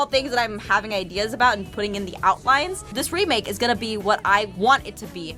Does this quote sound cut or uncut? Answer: uncut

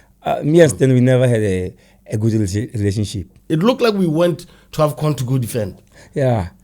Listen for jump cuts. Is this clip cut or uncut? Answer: cut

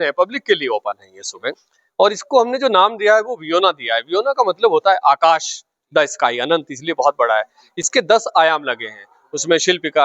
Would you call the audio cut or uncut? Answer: uncut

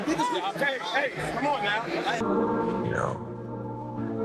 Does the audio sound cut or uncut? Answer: cut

